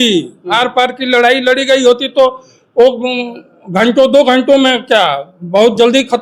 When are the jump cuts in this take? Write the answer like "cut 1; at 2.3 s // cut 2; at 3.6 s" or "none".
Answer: none

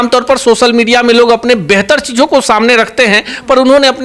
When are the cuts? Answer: none

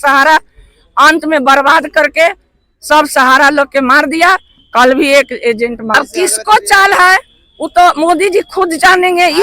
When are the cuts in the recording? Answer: cut 1; at 5.9 s

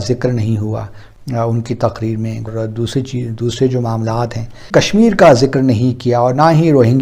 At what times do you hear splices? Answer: cut 1; at 2.5 s // cut 2; at 4.6 s

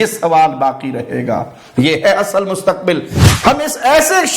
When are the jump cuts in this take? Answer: cut 1; at 3.1 s

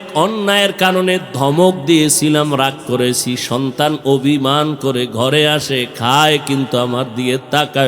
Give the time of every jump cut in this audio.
none

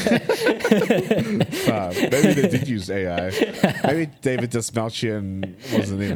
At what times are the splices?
none

